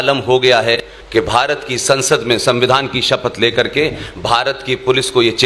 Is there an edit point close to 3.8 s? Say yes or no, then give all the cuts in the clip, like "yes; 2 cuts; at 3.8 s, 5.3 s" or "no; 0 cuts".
no; 1 cut; at 0.9 s